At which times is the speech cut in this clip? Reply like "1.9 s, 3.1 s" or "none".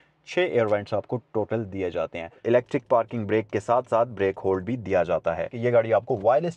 2.4 s, 5.5 s